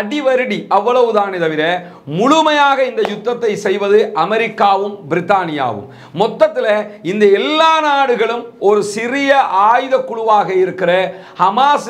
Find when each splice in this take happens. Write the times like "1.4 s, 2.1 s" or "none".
none